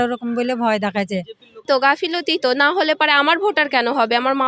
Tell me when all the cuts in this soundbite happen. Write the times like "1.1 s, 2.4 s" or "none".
1.6 s